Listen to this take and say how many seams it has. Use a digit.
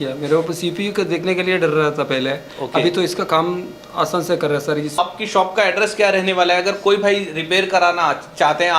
1